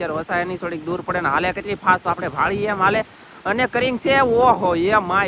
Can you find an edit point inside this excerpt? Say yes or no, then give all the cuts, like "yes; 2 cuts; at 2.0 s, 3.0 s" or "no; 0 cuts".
no; 0 cuts